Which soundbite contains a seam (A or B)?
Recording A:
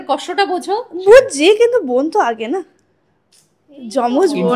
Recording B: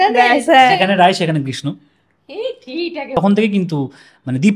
B